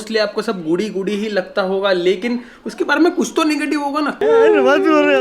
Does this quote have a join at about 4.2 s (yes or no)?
yes